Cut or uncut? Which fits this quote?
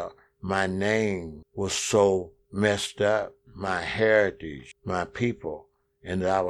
uncut